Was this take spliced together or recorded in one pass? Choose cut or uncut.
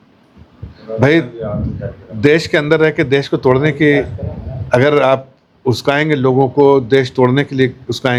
uncut